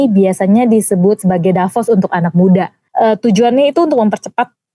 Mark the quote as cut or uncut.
cut